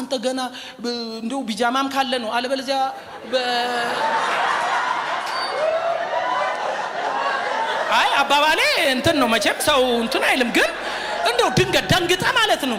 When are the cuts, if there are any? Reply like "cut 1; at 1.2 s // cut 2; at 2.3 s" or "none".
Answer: none